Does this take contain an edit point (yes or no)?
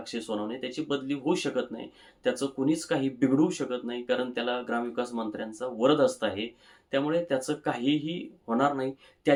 no